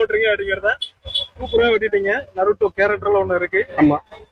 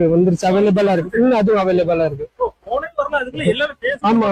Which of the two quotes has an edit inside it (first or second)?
first